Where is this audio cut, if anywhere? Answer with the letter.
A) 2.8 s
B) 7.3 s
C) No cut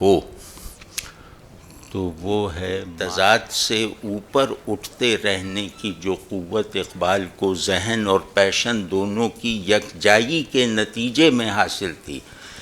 A